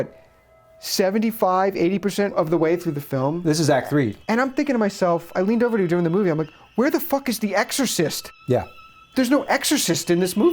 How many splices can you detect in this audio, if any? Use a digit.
2